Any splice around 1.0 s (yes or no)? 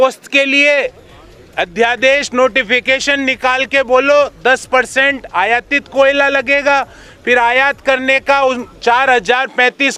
no